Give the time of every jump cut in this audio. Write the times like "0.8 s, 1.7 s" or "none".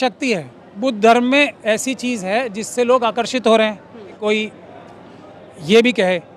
4.1 s